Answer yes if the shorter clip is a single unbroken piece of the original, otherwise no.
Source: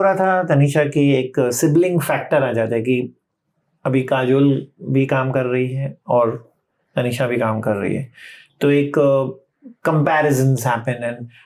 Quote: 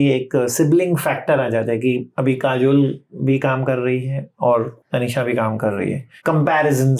no